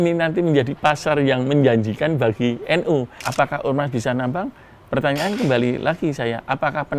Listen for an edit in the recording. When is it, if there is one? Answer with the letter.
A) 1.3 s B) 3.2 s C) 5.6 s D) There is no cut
B